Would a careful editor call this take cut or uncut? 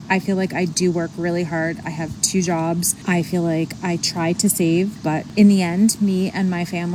uncut